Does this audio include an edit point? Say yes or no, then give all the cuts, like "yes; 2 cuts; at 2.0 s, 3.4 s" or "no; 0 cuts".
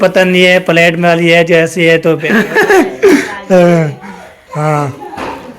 yes; 1 cut; at 2.2 s